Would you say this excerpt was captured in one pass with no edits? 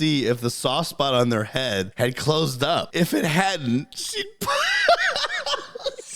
no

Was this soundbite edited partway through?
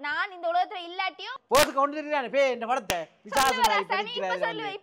yes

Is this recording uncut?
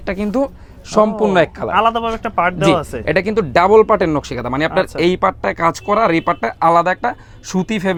yes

